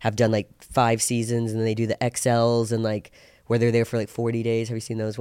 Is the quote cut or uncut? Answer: uncut